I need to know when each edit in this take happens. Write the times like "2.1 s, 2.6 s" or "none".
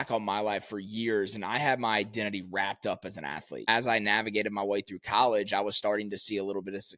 3.7 s